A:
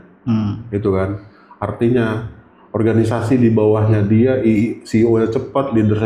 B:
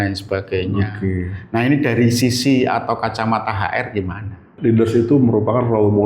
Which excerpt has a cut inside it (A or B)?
B